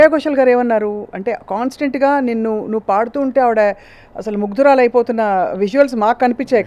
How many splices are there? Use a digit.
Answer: 0